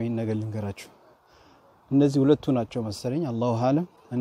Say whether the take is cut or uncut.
uncut